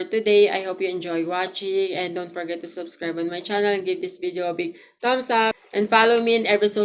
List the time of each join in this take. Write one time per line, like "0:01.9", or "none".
none